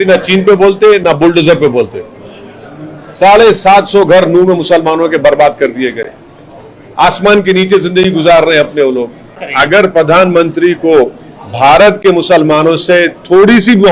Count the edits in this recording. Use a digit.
1